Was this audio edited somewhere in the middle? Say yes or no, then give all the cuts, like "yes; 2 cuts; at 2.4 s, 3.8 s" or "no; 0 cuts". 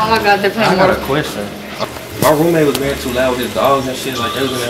yes; 1 cut; at 1.7 s